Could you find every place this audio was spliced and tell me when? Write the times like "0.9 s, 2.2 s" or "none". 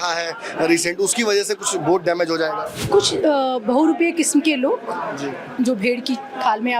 2.8 s